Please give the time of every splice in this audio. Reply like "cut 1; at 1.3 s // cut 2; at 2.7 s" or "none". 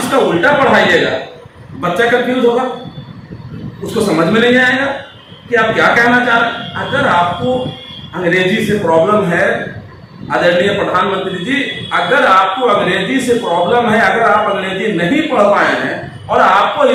none